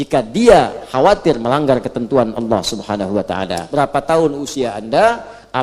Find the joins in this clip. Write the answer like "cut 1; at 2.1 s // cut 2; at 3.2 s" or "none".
cut 1; at 3.6 s